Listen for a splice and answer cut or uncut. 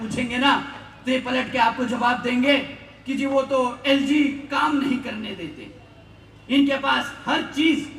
uncut